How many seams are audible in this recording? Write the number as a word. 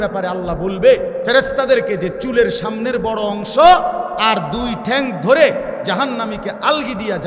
three